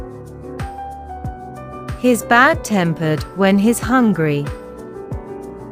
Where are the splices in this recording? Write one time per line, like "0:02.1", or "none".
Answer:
none

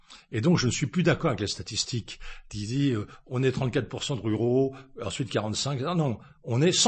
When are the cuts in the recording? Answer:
none

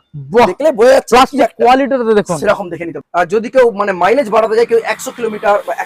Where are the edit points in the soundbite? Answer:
0:03.0

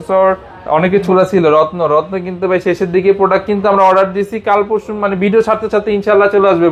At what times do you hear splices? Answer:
0:01.0

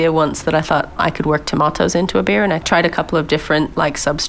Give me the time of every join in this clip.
0:01.0
0:02.6

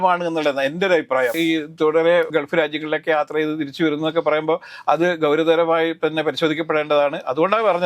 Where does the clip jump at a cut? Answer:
0:01.4
0:02.3

